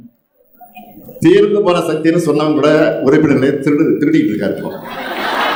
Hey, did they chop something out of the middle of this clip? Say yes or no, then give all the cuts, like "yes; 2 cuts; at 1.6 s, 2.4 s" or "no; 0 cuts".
no; 0 cuts